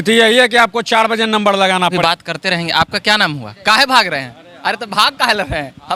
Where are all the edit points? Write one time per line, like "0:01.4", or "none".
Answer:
0:02.0